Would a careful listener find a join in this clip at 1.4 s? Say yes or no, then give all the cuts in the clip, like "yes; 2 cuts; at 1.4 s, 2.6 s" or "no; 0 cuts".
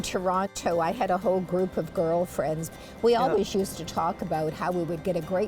no; 1 cut; at 2.7 s